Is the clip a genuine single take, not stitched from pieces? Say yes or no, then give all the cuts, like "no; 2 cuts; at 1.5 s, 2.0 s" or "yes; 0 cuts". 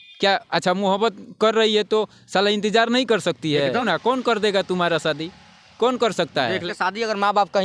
no; 2 cuts; at 3.8 s, 6.7 s